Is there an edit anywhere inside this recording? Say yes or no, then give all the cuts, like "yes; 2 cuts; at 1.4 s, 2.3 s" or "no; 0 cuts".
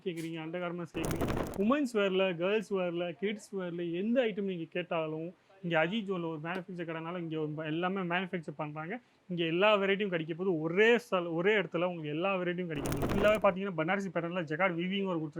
yes; 1 cut; at 13.0 s